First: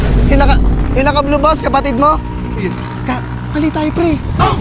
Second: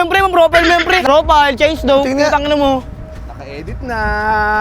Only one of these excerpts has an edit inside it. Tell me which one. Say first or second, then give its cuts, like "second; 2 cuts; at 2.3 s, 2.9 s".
second; 1 cut; at 1.0 s